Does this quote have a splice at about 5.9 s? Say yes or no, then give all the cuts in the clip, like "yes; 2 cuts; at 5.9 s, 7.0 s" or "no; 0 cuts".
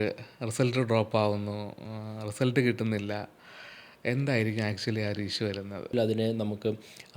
yes; 1 cut; at 5.9 s